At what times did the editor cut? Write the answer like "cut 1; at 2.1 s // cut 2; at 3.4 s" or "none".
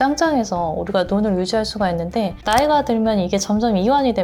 none